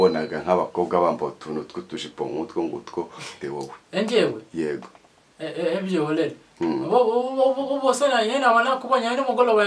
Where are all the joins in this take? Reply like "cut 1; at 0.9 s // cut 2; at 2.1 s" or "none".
cut 1; at 3.3 s

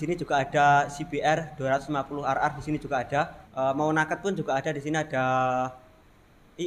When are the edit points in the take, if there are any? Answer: cut 1; at 3.4 s

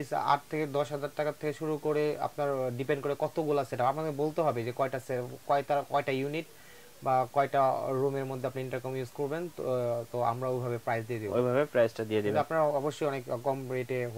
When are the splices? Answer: none

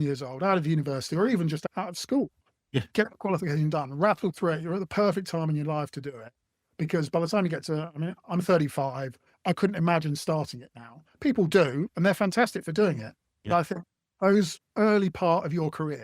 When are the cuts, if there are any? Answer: cut 1; at 1.6 s

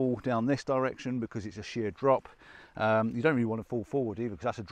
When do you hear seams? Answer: none

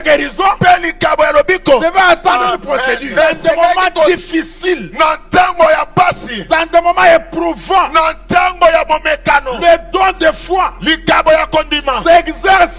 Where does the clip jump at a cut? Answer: cut 1; at 4.1 s

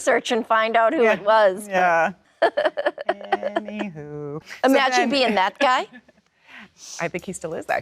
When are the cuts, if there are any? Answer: cut 1; at 2.2 s // cut 2; at 4.5 s

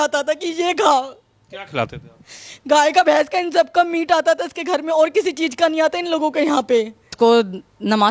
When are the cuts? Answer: cut 1; at 7.1 s

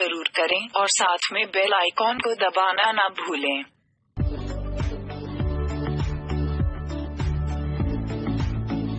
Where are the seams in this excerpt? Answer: cut 1; at 5.4 s

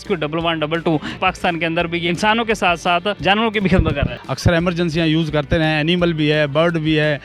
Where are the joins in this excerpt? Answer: cut 1; at 1.1 s // cut 2; at 2.1 s // cut 3; at 3.2 s // cut 4; at 4.1 s

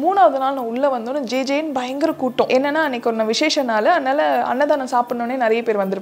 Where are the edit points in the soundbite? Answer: cut 1; at 2.5 s

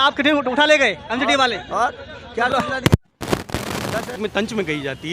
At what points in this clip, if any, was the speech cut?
cut 1; at 4.2 s

